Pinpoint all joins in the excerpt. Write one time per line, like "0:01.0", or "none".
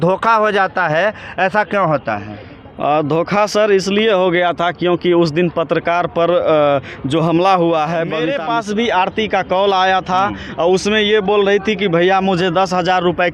0:08.3